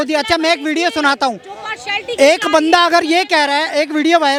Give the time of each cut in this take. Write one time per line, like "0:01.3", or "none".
none